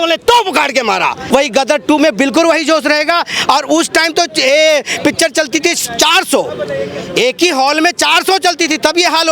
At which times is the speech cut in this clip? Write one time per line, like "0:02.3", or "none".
0:01.2